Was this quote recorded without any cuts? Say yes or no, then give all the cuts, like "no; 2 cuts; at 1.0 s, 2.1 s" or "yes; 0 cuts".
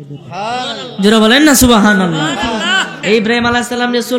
no; 1 cut; at 3.0 s